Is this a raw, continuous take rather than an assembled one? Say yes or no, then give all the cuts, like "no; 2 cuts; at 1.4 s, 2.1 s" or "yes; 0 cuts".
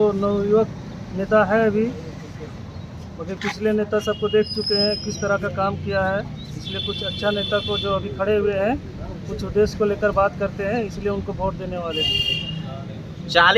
yes; 0 cuts